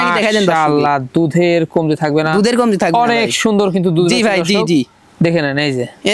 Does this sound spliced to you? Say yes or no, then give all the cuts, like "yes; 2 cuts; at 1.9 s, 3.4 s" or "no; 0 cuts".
no; 0 cuts